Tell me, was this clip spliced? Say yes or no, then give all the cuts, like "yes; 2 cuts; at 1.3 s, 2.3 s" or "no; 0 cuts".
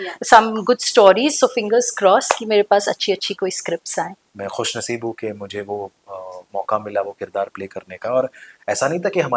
yes; 1 cut; at 4.2 s